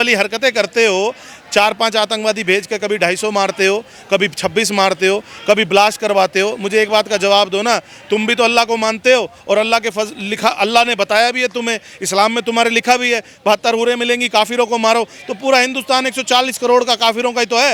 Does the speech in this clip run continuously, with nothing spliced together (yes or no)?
yes